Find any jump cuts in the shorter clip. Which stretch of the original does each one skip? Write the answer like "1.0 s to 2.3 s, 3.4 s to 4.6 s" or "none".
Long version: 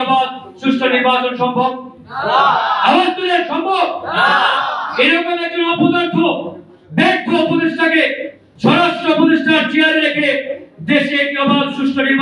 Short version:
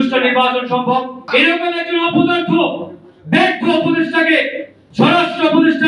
1.9 s to 4.8 s